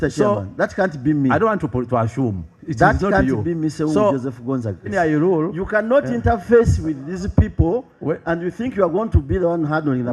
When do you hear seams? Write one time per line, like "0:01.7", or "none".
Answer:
0:04.8